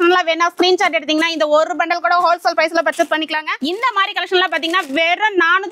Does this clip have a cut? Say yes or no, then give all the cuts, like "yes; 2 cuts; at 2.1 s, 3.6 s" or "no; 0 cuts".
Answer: yes; 1 cut; at 3.5 s